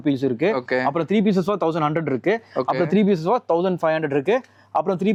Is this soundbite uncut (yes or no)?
yes